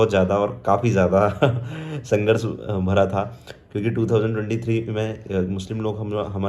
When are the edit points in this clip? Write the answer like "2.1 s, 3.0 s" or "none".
none